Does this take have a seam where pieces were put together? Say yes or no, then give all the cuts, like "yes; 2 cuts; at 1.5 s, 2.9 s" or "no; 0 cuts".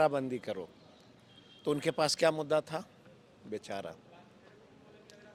no; 0 cuts